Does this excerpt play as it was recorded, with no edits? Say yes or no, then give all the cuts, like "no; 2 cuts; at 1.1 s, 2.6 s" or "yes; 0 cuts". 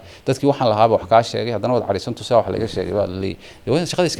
yes; 0 cuts